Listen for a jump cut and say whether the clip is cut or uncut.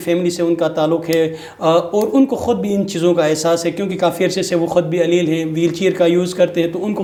uncut